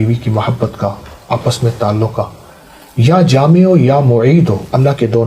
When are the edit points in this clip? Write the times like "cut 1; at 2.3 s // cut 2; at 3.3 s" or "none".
none